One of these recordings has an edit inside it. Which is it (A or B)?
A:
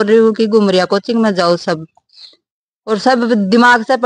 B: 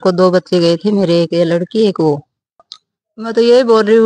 B